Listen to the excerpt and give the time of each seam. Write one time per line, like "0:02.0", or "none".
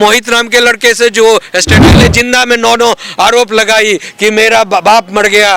0:01.8